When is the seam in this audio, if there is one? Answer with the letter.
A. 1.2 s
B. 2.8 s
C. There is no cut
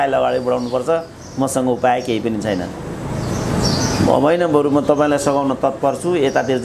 C